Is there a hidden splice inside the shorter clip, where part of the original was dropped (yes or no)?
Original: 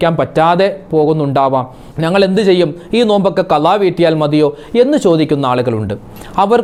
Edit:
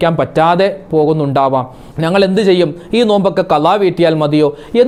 no